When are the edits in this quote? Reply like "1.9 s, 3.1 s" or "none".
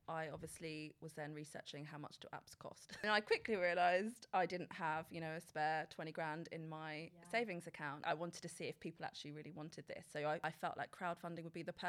3.0 s, 8.0 s, 10.4 s